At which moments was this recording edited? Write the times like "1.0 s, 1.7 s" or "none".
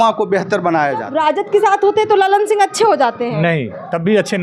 1.1 s